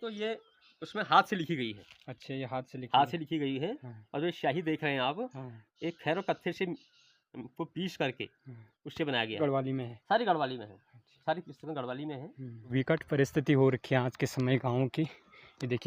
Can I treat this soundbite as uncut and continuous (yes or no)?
no